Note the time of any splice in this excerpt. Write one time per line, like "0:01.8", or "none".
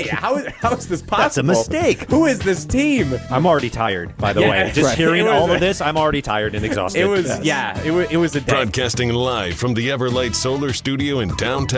0:08.5